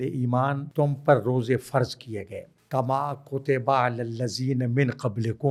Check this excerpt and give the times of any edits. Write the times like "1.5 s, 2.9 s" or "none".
none